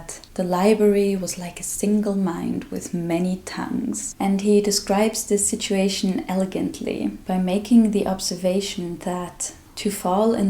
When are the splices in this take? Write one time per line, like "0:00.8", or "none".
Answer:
0:04.1